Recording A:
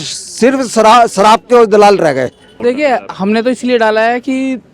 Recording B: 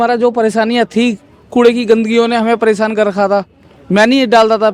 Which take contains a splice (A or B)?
A